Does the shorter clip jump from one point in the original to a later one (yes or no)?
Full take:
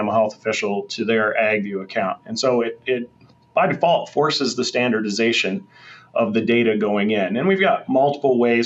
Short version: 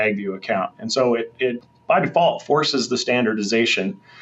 yes